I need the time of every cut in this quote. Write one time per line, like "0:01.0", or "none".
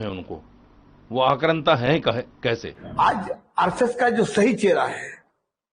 0:02.8